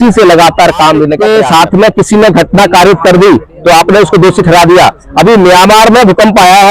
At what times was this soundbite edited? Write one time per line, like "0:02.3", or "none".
0:01.2